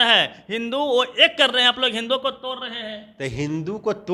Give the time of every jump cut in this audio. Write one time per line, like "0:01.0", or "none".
none